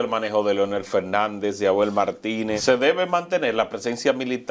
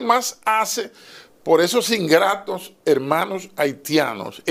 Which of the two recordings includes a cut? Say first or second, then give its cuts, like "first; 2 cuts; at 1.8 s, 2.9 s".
first; 1 cut; at 2.6 s